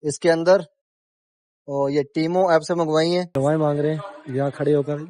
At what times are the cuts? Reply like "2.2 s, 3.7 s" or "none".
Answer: 3.3 s